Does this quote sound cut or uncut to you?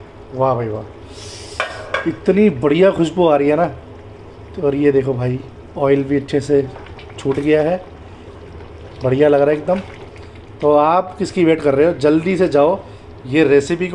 uncut